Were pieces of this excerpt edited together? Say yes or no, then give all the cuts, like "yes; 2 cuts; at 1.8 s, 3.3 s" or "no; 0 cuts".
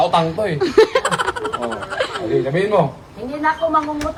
no; 0 cuts